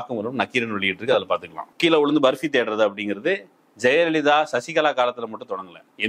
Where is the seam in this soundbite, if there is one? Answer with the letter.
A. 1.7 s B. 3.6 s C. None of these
A